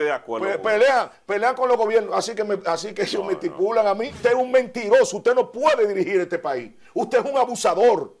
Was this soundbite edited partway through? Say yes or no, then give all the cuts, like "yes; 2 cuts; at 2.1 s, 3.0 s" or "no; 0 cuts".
yes; 1 cut; at 4.2 s